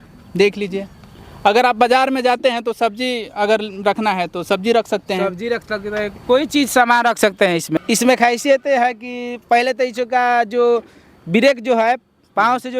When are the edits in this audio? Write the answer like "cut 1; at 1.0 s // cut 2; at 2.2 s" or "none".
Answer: cut 1; at 7.8 s